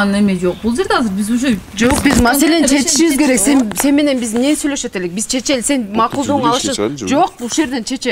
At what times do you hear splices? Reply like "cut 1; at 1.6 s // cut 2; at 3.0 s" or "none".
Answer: none